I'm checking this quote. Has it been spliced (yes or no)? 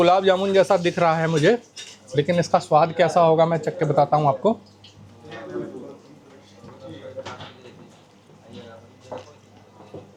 no